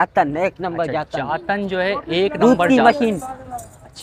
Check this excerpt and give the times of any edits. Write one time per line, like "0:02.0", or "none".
none